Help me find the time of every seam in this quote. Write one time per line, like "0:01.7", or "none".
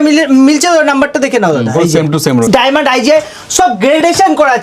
0:02.4